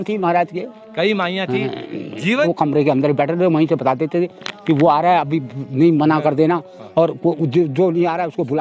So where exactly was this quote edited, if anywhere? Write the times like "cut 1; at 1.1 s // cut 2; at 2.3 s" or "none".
cut 1; at 2.5 s

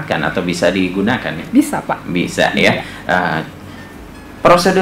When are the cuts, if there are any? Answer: none

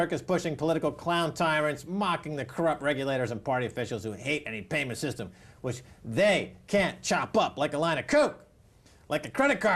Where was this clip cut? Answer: cut 1; at 4.4 s

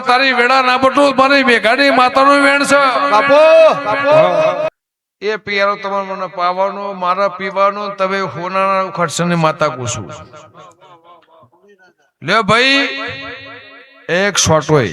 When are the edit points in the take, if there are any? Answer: cut 1; at 4.7 s

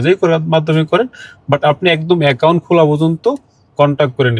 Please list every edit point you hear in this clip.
none

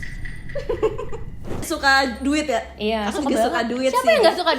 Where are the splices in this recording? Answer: cut 1; at 1.6 s

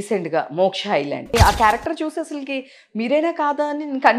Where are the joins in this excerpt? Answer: cut 1; at 1.3 s

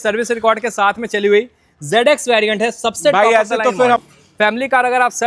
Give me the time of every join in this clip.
cut 1; at 4.0 s

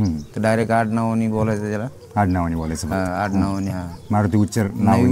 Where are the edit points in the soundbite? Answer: none

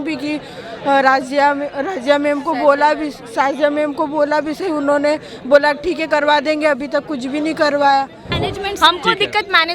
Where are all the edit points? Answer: cut 1; at 8.4 s

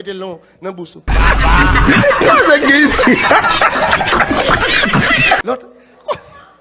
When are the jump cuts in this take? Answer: cut 1; at 1.0 s // cut 2; at 5.4 s

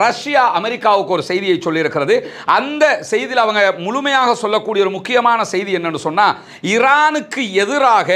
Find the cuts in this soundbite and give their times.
none

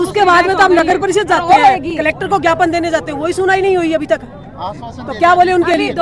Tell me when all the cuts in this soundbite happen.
none

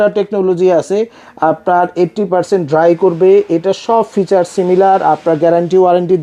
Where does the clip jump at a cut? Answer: none

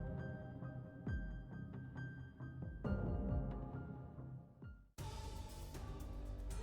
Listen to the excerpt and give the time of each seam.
cut 1; at 4.8 s

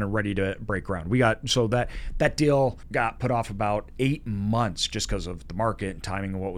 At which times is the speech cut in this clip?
cut 1; at 2.8 s

